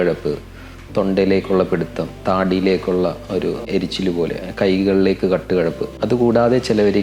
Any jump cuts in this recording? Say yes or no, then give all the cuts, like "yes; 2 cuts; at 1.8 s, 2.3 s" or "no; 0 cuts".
yes; 2 cuts; at 3.7 s, 5.9 s